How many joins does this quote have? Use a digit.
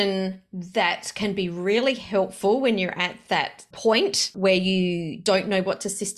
3